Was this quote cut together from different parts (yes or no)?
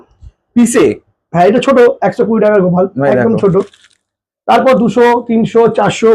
no